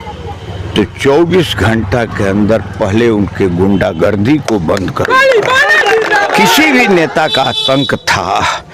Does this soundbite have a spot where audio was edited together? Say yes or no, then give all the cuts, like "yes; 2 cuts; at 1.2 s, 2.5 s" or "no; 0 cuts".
yes; 1 cut; at 6.5 s